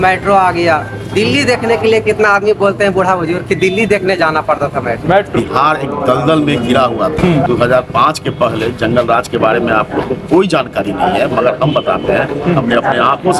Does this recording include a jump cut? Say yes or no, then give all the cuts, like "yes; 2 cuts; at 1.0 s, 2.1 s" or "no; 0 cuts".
yes; 2 cuts; at 5.3 s, 7.2 s